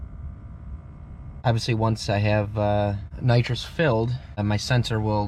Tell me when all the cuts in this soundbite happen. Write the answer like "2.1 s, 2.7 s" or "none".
1.4 s, 3.1 s, 4.4 s